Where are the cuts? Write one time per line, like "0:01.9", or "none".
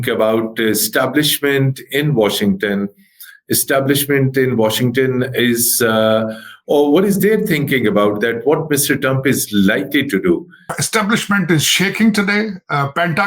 0:10.8